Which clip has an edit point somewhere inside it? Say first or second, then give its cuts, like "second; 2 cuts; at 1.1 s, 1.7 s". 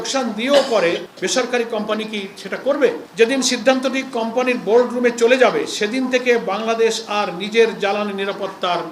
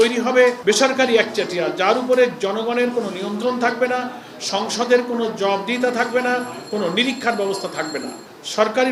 first; 2 cuts; at 1.1 s, 3.1 s